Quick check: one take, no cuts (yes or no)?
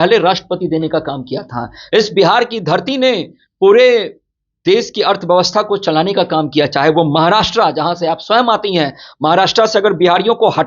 yes